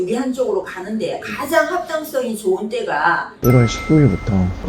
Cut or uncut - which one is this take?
cut